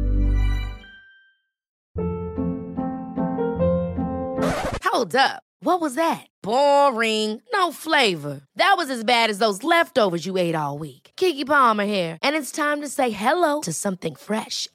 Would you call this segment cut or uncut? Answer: cut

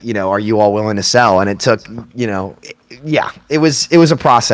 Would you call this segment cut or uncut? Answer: uncut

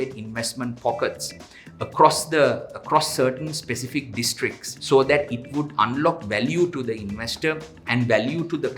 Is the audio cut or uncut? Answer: cut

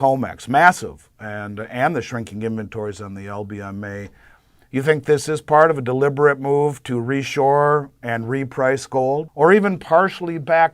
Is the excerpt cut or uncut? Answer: cut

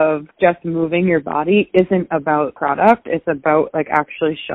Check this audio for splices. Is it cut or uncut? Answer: uncut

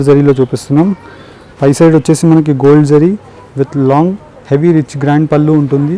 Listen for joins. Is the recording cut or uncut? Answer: uncut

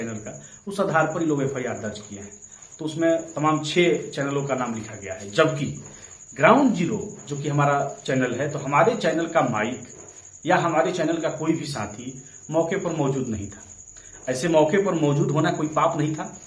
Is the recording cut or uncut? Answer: uncut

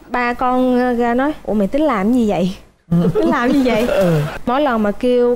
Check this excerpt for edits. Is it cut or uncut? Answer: cut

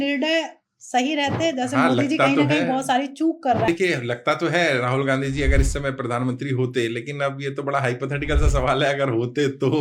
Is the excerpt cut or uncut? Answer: cut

